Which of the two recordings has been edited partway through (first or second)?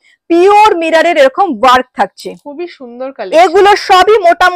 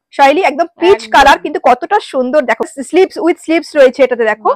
second